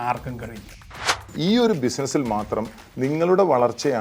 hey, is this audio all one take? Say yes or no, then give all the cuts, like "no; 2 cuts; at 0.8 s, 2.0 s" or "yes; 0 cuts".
no; 1 cut; at 1.2 s